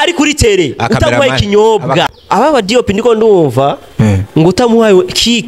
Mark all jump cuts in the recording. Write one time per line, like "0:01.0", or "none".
0:02.1